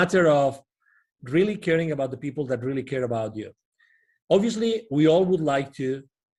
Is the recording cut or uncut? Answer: uncut